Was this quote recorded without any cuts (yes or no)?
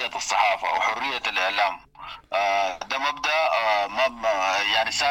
yes